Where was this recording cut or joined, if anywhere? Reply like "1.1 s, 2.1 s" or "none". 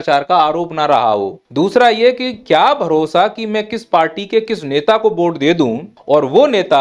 1.4 s, 5.9 s